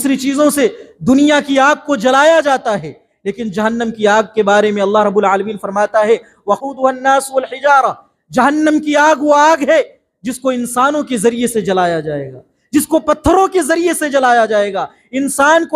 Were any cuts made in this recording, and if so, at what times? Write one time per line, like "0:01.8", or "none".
0:06.6